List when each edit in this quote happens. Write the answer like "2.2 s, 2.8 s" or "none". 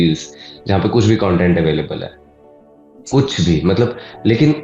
none